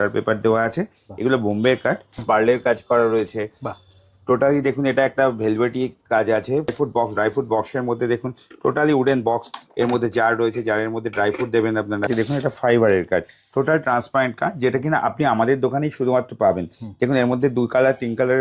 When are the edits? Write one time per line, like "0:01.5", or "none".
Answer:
0:02.2
0:06.7
0:12.1